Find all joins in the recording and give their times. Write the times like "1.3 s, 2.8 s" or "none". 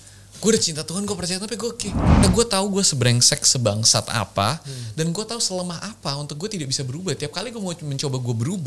2.2 s